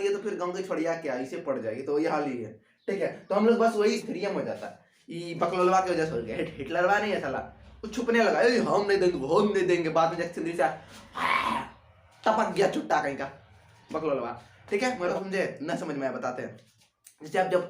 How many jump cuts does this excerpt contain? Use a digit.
2